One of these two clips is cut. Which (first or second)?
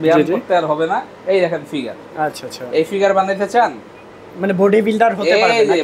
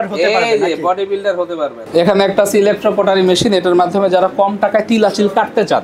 second